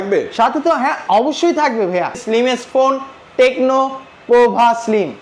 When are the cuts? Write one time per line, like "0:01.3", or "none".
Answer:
0:02.2